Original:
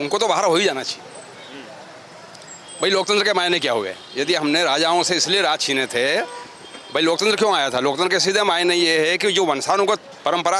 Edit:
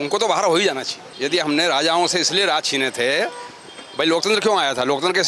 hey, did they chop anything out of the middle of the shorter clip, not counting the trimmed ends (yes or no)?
yes